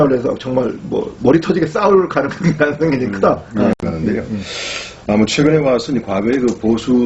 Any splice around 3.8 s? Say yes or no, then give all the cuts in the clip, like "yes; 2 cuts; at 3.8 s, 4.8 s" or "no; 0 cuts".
yes; 1 cut; at 3.8 s